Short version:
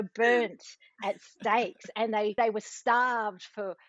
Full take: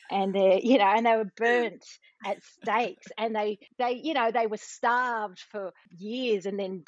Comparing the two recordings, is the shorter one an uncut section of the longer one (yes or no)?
no